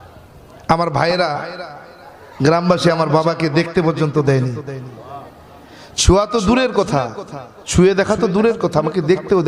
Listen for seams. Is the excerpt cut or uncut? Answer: uncut